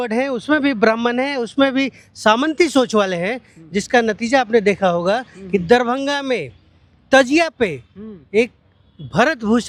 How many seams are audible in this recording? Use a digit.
0